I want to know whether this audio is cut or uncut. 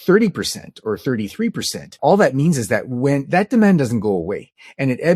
cut